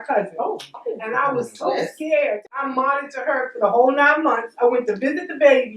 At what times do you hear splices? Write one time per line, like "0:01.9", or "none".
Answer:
0:02.5